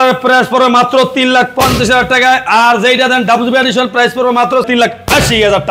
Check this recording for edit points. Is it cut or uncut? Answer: cut